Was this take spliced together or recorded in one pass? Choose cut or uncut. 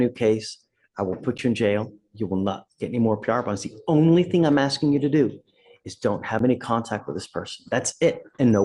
uncut